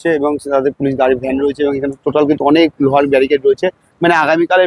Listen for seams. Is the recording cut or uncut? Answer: uncut